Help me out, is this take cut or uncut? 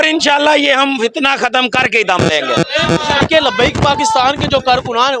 cut